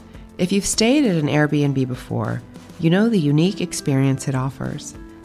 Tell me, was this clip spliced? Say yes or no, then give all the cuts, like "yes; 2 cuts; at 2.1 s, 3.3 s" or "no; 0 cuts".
no; 0 cuts